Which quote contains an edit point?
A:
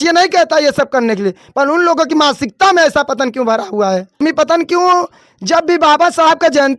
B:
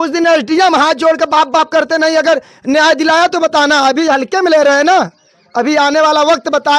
A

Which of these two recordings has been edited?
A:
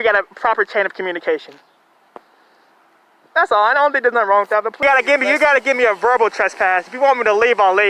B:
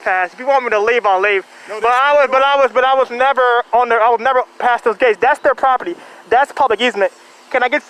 A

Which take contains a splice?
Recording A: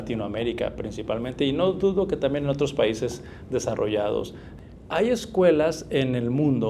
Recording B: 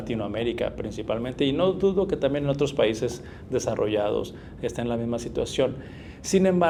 A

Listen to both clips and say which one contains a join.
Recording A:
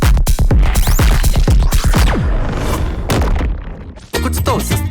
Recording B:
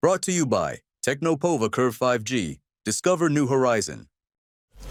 A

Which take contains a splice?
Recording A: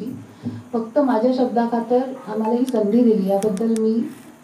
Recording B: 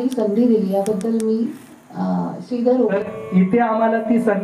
B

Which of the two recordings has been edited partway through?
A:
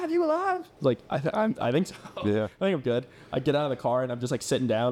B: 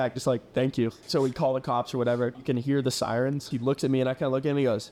B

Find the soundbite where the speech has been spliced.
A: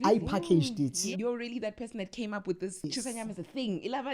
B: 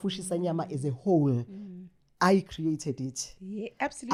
A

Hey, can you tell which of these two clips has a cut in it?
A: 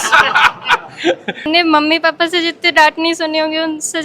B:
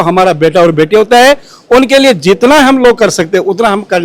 A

